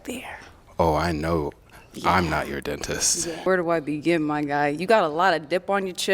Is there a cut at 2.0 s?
no; 1 cut; at 3.4 s

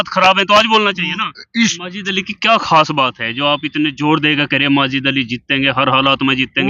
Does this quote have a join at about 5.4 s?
no; 1 cut; at 1.8 s

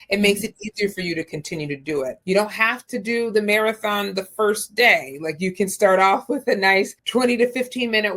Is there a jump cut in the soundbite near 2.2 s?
yes; 1 cut; at 2.2 s

